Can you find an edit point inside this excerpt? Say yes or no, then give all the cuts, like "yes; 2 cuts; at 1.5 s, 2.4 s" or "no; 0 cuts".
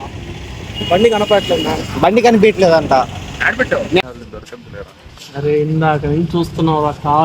yes; 1 cut; at 4.0 s